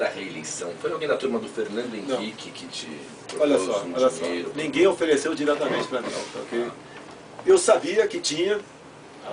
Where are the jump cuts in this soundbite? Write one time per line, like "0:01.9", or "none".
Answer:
none